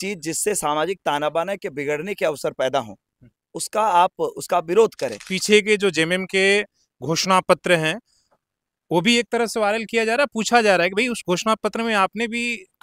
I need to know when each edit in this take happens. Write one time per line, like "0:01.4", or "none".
0:05.3